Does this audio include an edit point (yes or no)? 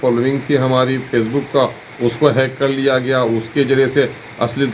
no